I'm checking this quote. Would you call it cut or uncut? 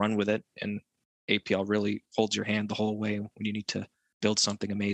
cut